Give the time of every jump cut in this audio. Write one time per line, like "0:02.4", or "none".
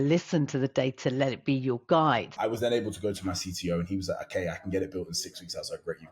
0:02.3

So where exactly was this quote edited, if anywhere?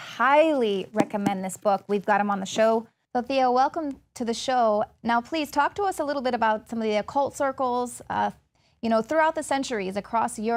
none

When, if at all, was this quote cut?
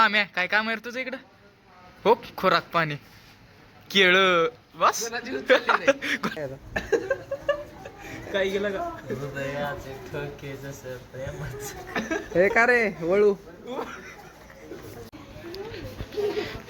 0:06.3
0:15.1

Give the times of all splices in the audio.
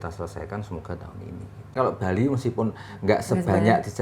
0:01.7

